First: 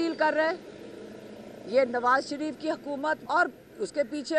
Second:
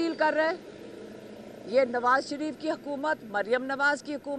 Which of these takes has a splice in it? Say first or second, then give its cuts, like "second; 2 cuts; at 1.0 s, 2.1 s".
first; 1 cut; at 3.2 s